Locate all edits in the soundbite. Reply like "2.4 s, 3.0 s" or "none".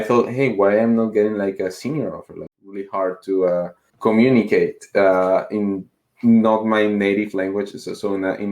2.5 s